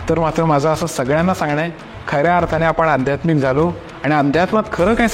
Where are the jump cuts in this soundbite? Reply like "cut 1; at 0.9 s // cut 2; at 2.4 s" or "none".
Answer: none